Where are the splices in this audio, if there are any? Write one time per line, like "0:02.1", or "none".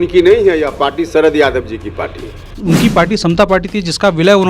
0:02.5